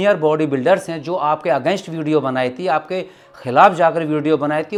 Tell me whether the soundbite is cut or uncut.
uncut